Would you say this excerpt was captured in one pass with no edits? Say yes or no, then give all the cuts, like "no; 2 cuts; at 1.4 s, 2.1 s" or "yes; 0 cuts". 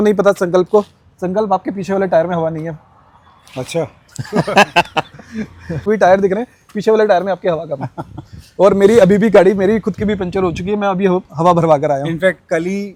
yes; 0 cuts